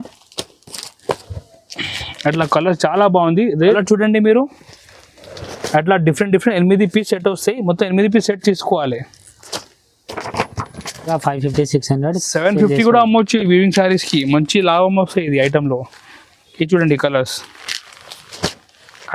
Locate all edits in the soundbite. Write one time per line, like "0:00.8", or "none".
0:03.7
0:11.1